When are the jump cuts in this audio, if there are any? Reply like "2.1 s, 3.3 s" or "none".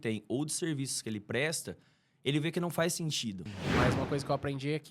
3.5 s